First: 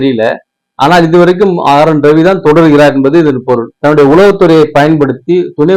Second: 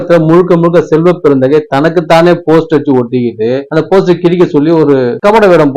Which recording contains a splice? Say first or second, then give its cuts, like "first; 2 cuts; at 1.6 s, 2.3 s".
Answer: first; 1 cut; at 3.8 s